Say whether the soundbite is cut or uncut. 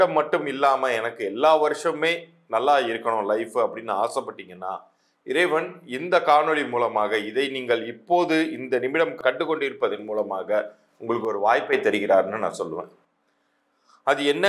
uncut